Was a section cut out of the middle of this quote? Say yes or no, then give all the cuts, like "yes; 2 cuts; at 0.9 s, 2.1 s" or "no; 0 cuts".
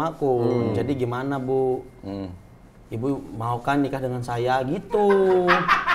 no; 0 cuts